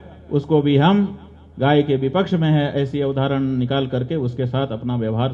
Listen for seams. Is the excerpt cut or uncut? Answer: uncut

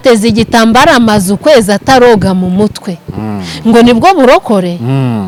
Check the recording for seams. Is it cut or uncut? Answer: uncut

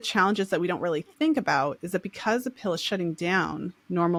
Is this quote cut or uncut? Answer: uncut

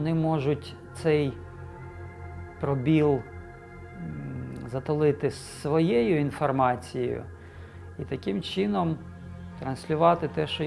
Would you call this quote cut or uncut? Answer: uncut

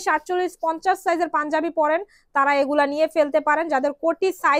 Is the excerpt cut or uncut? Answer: uncut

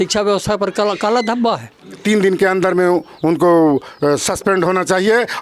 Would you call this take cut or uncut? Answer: cut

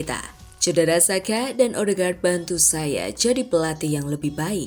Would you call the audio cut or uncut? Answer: uncut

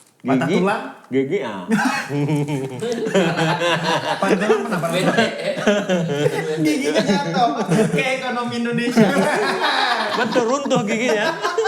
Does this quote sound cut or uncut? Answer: uncut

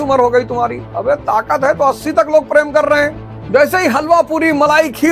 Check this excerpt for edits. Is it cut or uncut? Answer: cut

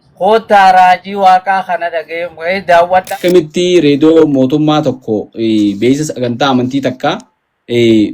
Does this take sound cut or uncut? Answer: cut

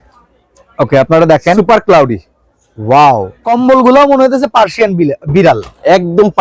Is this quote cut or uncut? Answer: cut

